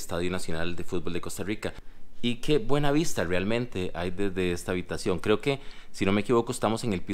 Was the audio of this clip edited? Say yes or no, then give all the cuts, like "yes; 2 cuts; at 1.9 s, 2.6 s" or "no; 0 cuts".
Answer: yes; 1 cut; at 1.9 s